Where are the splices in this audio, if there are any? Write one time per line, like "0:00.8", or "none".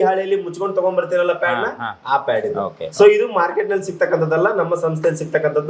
none